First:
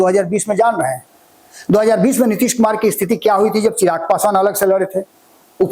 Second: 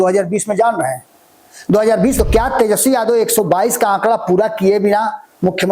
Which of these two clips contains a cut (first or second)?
second